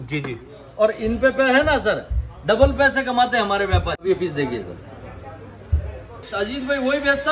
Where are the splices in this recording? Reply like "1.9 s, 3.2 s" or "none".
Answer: 4.0 s, 6.3 s